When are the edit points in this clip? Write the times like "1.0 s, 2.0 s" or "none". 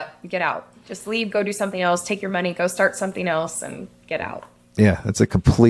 none